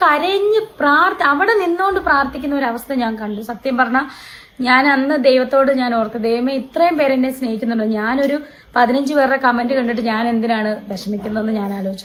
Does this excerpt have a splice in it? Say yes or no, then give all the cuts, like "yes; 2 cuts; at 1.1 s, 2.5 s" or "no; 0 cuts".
no; 0 cuts